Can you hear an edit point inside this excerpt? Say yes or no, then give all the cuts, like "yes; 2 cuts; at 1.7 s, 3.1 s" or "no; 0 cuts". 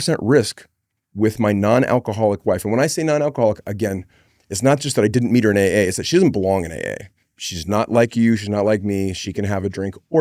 no; 0 cuts